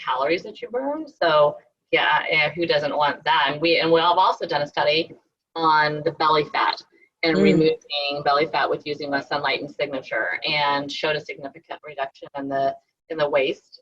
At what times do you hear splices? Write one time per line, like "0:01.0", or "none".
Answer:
0:05.2